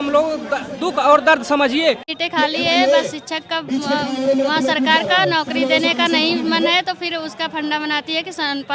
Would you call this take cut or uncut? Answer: cut